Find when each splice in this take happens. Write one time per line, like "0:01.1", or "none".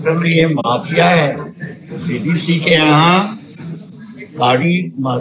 none